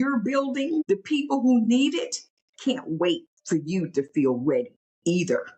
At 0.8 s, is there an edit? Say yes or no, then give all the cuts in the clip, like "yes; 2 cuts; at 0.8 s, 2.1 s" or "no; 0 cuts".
yes; 2 cuts; at 0.8 s, 3.3 s